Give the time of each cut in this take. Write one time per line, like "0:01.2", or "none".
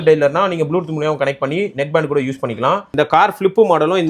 0:02.9